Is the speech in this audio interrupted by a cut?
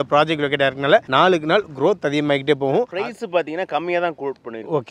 yes; 1 cut; at 2.9 s

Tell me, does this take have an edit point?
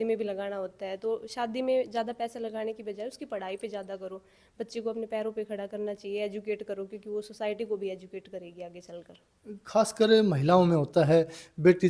no; 0 cuts

